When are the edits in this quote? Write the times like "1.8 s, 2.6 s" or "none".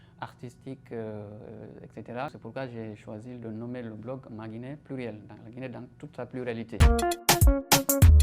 6.8 s